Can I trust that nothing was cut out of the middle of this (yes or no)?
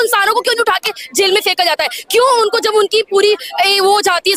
yes